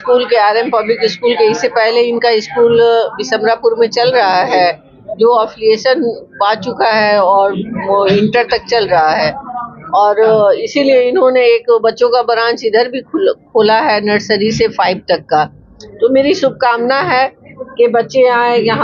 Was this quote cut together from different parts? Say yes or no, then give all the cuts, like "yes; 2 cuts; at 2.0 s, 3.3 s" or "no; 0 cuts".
no; 0 cuts